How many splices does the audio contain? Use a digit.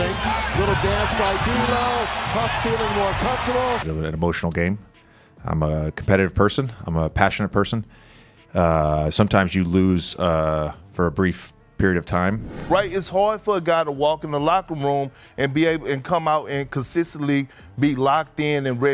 2